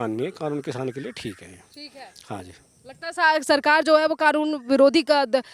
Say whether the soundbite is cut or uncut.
uncut